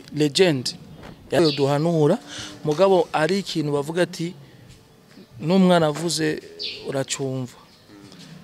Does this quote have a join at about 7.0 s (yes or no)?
no